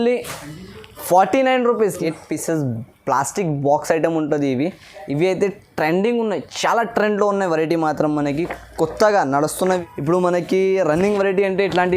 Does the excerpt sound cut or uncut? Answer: cut